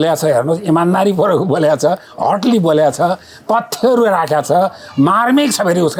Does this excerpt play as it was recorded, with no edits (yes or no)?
yes